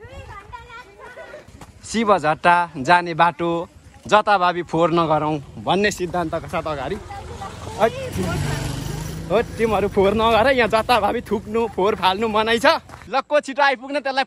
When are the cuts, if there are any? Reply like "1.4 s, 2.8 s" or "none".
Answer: 1.5 s, 13.0 s